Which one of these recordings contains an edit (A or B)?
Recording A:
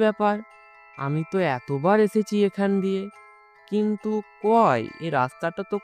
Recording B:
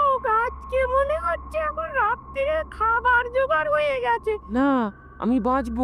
B